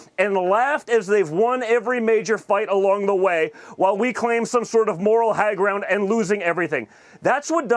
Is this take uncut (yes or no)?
yes